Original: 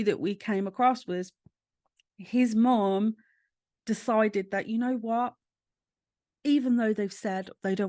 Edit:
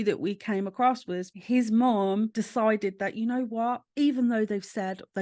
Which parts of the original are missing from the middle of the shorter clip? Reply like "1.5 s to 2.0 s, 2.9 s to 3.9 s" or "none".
1.3 s to 2.2 s, 3.2 s to 3.8 s, 5.4 s to 6.3 s